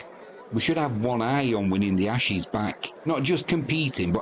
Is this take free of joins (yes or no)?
no